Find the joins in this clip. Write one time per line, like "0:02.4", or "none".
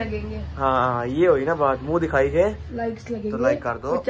none